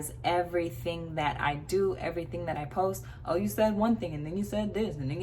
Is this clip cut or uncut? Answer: uncut